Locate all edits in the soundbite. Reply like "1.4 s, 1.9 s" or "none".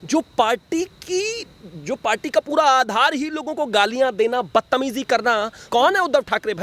5.7 s